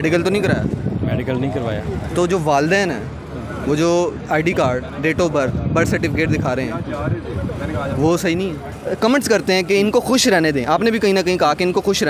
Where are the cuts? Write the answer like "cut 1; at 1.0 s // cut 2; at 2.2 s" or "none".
cut 1; at 8.7 s